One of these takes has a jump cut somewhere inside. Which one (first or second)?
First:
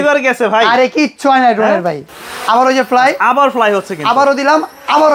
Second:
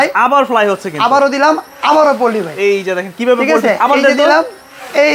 first